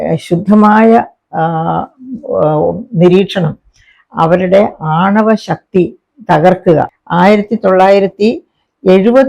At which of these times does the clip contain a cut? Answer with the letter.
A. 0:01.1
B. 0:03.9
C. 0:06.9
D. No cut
C